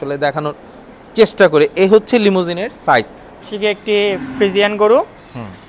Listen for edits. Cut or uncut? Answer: cut